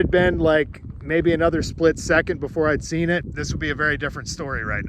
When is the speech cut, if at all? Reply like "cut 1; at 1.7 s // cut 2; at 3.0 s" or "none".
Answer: cut 1; at 3.3 s